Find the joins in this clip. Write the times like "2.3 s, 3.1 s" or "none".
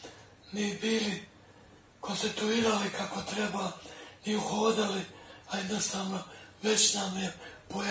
none